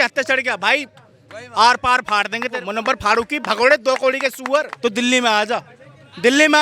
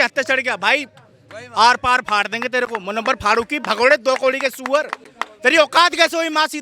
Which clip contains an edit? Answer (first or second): first